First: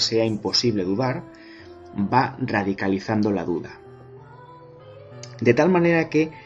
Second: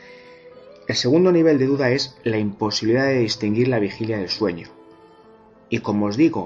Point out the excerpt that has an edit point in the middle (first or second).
first